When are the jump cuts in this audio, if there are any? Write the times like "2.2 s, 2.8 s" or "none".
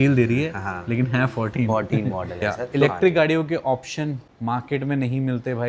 2.5 s